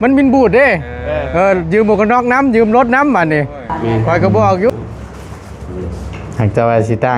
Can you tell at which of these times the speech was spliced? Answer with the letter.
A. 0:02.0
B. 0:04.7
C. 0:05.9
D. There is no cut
B